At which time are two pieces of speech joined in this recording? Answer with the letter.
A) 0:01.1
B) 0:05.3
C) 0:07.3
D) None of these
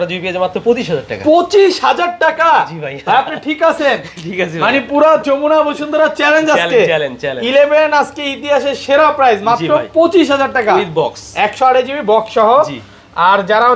D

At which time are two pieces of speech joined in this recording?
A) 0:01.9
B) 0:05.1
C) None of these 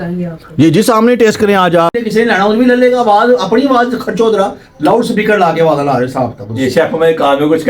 A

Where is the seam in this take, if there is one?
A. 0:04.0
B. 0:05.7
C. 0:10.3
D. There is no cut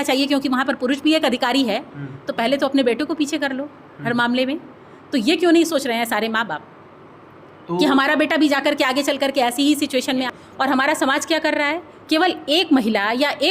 C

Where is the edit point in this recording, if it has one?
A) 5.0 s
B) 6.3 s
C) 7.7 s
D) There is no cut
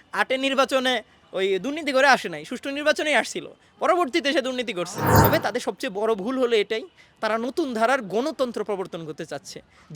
A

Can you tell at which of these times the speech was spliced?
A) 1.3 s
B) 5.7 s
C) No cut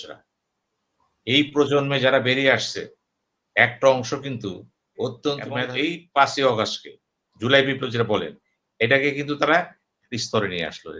B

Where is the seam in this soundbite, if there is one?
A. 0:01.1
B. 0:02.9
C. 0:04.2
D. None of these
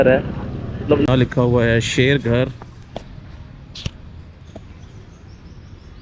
A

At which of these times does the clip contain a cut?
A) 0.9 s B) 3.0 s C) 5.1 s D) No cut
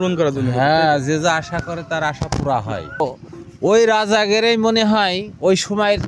B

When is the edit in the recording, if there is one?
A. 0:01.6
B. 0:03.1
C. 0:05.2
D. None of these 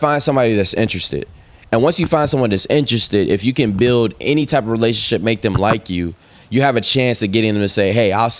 D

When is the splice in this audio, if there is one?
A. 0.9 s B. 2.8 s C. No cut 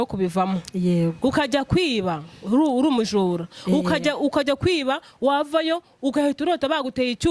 C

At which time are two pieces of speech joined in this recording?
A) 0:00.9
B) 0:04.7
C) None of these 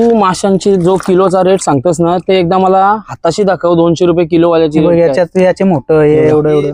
C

